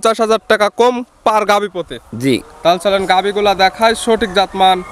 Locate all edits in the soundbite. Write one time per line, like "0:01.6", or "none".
none